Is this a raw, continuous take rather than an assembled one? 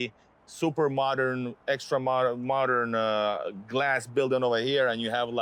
yes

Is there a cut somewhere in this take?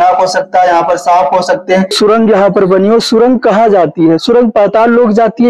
yes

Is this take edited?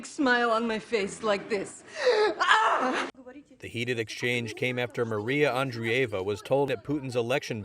yes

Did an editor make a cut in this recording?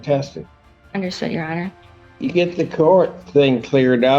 yes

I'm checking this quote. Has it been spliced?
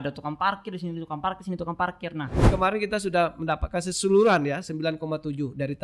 yes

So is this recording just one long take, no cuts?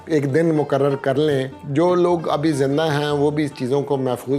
no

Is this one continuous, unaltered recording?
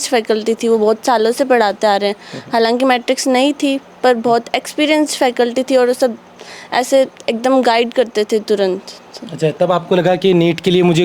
yes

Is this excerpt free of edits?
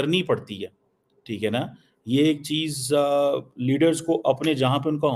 yes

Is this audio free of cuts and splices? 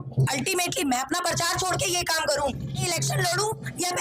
no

